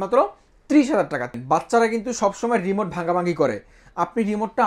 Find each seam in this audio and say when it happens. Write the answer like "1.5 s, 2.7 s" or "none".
1.4 s